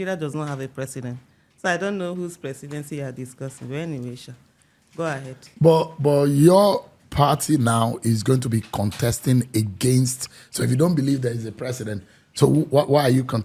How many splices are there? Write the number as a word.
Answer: zero